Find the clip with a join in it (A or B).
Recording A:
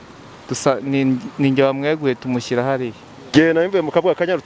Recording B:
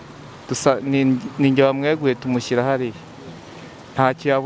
A